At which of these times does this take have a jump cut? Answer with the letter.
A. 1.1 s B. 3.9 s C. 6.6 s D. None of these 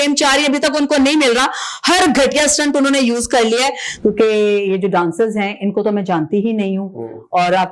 B